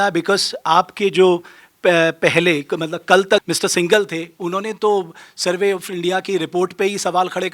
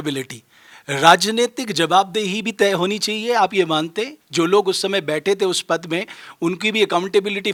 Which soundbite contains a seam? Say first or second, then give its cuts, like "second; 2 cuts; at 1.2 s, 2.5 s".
first; 1 cut; at 3.4 s